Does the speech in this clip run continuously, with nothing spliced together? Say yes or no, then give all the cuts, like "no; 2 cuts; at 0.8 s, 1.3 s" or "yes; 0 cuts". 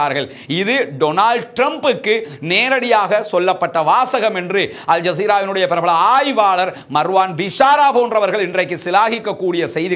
yes; 0 cuts